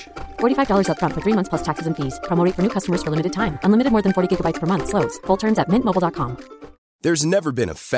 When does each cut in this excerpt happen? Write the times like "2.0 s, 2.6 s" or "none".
none